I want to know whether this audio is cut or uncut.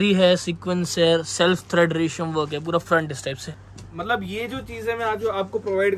cut